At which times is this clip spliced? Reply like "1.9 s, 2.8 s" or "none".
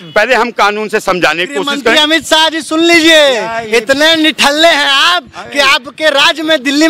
none